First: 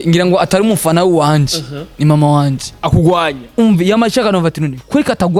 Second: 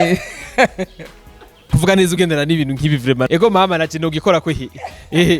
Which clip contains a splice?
second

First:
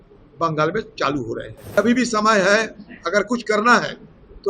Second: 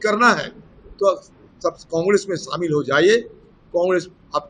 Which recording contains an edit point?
first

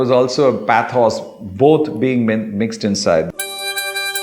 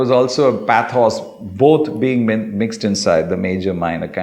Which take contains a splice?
first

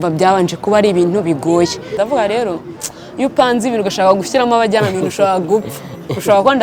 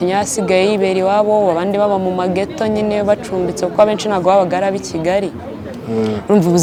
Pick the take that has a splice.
first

